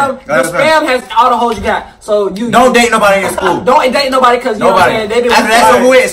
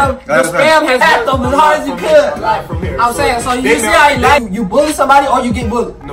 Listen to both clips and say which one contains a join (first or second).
second